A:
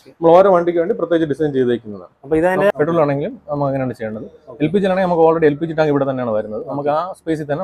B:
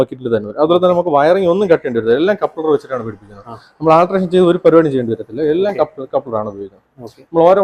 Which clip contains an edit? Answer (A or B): A